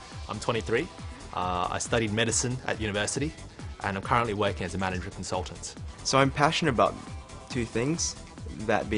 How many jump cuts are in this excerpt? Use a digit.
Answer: 1